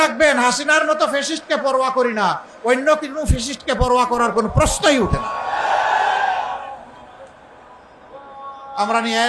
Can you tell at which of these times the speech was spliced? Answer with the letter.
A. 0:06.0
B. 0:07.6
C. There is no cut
C